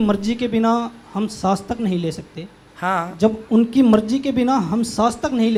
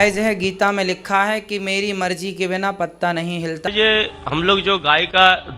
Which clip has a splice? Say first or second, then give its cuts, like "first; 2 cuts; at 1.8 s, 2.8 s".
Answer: second; 1 cut; at 3.7 s